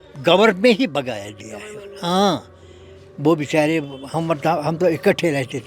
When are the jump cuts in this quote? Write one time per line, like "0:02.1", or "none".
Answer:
none